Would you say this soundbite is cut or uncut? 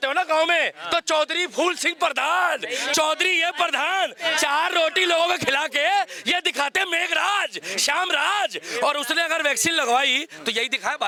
uncut